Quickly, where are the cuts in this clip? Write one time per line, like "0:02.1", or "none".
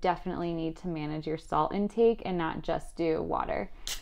none